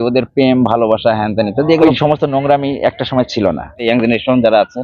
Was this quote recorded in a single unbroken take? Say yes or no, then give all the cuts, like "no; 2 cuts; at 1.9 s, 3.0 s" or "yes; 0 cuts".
no; 2 cuts; at 1.8 s, 3.7 s